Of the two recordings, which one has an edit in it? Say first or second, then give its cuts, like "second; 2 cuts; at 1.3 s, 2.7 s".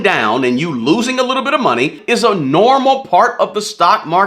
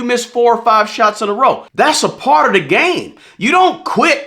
second; 1 cut; at 1.7 s